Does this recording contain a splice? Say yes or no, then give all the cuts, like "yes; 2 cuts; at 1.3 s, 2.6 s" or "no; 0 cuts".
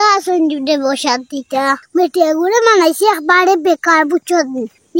no; 0 cuts